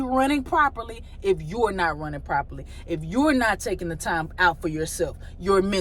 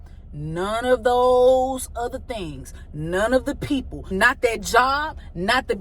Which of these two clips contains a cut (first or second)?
second